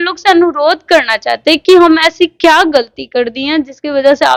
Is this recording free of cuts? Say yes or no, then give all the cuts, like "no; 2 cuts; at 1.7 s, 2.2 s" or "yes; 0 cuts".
yes; 0 cuts